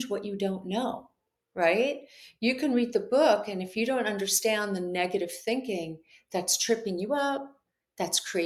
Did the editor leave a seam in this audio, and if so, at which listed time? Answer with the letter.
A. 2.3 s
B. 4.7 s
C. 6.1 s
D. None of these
D